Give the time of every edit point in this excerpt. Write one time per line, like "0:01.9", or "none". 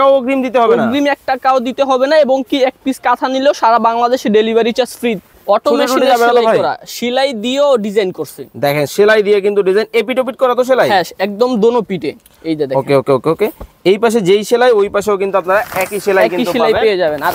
0:05.3